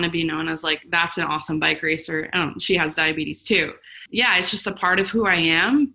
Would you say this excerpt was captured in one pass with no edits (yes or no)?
no